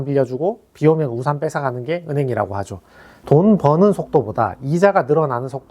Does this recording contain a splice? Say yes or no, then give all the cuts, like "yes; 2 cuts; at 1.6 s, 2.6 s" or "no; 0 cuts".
yes; 1 cut; at 3.1 s